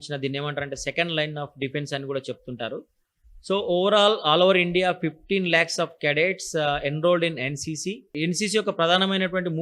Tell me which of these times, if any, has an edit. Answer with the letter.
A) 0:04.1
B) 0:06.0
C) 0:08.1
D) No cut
C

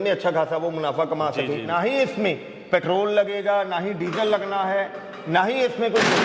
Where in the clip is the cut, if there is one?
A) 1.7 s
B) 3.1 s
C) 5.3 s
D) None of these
A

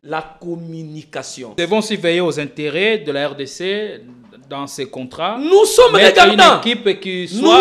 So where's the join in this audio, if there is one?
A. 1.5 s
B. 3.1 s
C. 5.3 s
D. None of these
A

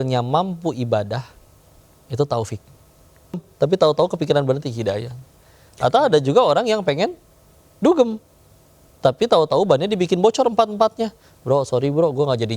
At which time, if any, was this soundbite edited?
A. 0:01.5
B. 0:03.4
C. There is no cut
B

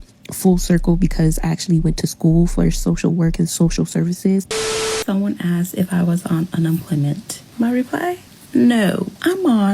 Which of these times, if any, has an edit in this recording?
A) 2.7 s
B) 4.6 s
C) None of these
B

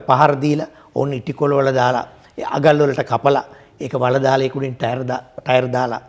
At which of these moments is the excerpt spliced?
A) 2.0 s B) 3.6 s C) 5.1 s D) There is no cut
D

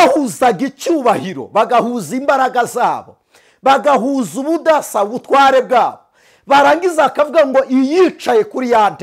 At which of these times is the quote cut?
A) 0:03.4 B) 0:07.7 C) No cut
C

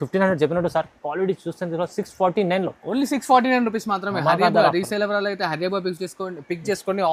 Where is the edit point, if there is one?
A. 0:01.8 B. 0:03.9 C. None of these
C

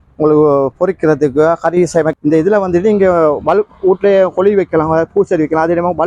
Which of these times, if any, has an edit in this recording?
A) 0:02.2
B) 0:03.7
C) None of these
A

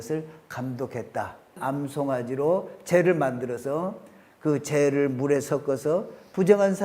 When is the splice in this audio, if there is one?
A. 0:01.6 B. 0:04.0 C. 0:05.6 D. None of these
A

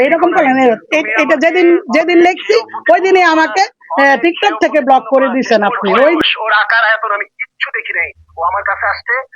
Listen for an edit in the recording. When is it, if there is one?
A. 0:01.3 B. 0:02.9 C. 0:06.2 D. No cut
C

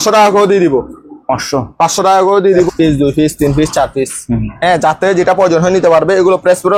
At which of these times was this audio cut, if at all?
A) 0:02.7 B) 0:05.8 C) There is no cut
A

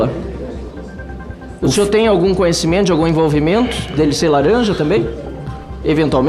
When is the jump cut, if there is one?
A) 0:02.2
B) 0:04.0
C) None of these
C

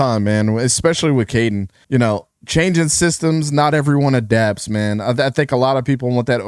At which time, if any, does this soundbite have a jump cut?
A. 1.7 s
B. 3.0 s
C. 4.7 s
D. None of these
A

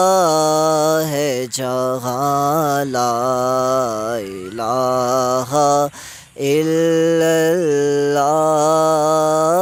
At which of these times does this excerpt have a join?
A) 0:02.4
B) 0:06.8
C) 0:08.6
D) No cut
D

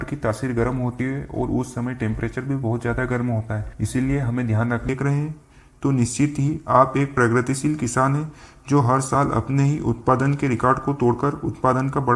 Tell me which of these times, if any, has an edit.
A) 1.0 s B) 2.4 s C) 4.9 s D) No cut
C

